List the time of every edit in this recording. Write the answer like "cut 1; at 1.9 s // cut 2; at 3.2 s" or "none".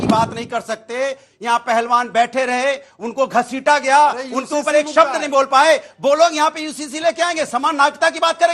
none